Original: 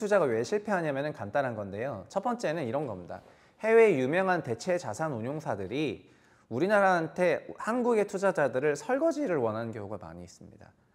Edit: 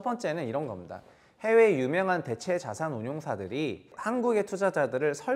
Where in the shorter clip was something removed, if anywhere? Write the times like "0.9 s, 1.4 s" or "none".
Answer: 3.9 s